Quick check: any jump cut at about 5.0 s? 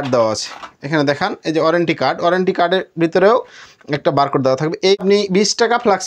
yes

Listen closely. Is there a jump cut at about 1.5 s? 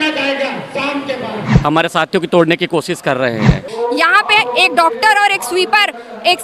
yes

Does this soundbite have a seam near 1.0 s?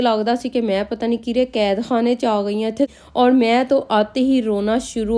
no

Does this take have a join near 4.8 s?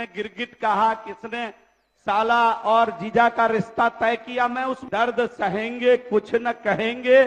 yes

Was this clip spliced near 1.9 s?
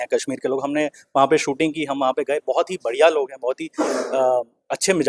no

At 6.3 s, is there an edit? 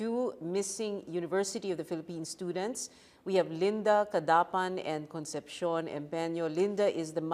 no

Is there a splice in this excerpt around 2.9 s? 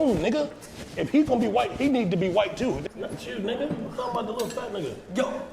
yes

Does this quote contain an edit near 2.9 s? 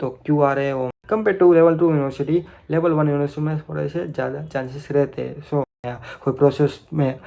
no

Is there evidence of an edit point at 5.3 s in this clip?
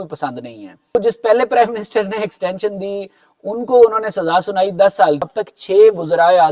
yes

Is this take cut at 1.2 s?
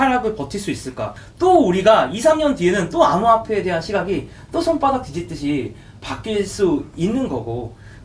yes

